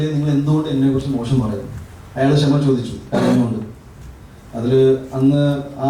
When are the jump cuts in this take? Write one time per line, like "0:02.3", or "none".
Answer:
none